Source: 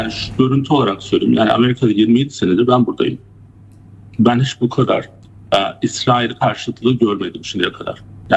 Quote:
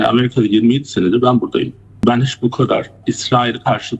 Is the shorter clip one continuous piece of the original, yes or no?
no